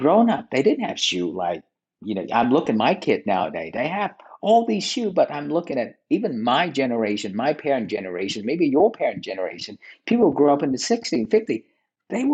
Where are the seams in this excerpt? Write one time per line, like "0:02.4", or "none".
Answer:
none